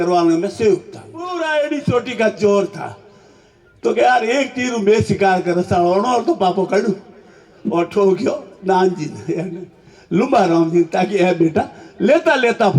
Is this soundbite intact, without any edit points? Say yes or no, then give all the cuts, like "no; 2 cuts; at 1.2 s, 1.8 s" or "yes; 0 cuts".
no; 1 cut; at 1.3 s